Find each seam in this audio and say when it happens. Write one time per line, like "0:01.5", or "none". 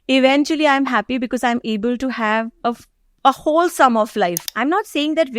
0:04.5